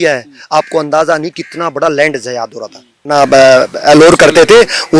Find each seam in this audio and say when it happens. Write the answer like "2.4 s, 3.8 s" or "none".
3.0 s